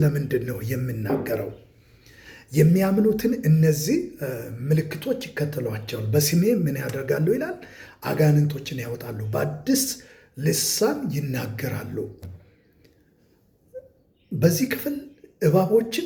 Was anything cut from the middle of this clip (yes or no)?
no